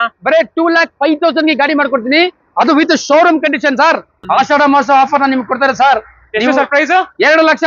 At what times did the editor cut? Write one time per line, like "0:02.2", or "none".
0:04.1